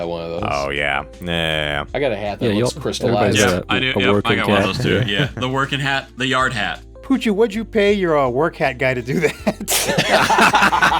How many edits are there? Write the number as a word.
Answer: one